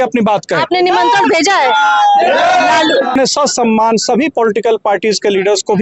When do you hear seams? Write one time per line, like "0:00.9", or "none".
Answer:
0:03.2